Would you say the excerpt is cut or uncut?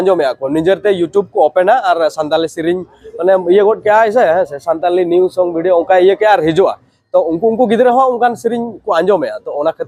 uncut